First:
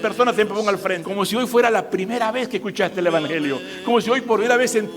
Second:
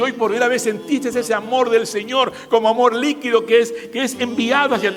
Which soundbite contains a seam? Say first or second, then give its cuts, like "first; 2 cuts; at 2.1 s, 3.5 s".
first; 1 cut; at 1.0 s